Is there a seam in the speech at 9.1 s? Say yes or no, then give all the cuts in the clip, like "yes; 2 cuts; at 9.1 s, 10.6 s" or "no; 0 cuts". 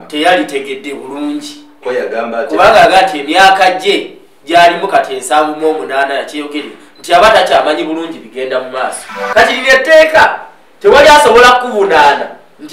yes; 1 cut; at 9.1 s